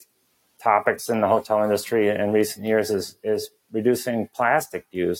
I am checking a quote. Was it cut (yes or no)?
no